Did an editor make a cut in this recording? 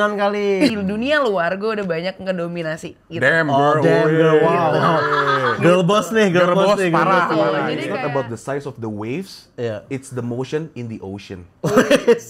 yes; 2 cuts; at 0.7 s, 7.8 s

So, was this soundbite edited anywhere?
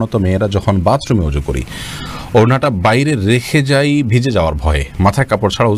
no; 0 cuts

